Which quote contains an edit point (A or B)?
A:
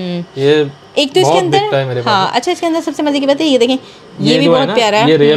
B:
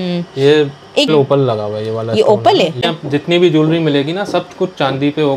B